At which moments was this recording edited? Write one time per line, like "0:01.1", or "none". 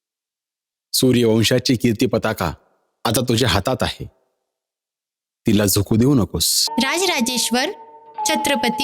0:06.7